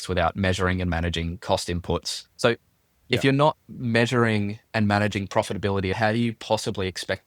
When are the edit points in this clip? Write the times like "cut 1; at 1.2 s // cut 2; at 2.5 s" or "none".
cut 1; at 2.1 s // cut 2; at 5.9 s